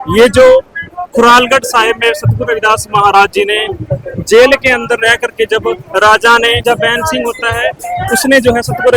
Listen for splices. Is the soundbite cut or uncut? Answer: uncut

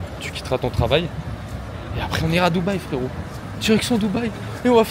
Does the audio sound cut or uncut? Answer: uncut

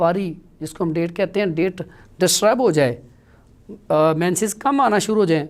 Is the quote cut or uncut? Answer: uncut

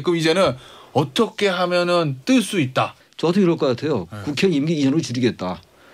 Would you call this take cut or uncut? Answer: cut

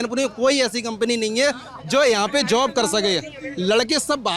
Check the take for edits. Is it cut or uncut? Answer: uncut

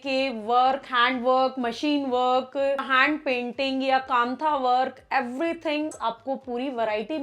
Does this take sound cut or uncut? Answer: cut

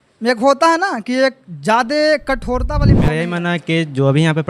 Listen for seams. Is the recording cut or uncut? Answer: cut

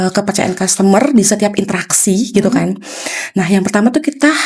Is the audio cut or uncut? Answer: uncut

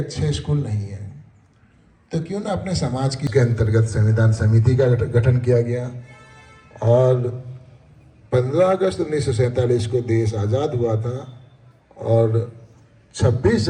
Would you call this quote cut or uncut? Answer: cut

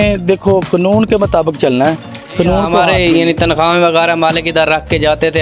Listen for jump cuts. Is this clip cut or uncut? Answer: cut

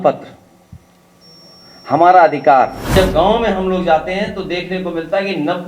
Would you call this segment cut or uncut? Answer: cut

